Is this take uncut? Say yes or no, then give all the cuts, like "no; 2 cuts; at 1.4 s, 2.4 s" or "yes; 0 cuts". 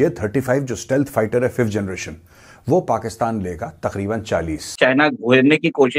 no; 1 cut; at 4.7 s